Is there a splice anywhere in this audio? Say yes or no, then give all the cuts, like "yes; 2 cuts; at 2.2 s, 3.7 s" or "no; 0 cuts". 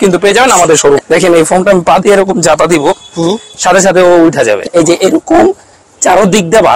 yes; 2 cuts; at 1.0 s, 4.7 s